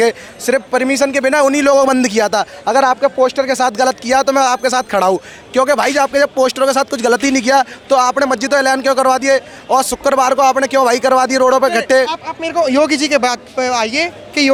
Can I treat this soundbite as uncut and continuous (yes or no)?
yes